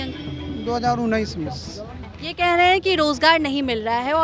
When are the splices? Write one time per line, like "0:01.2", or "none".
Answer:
0:02.1